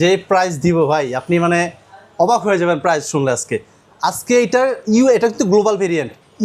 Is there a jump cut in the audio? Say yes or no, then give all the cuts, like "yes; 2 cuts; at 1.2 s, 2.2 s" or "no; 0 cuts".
no; 0 cuts